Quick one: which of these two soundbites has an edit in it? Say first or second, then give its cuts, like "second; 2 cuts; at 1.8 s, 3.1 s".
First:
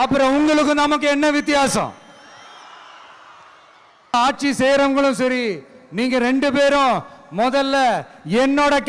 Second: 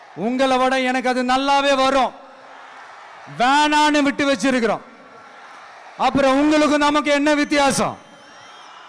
first; 1 cut; at 4.1 s